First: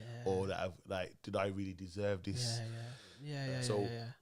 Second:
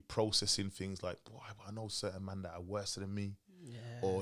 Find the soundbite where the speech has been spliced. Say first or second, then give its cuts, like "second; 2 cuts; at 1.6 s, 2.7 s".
first; 1 cut; at 3.3 s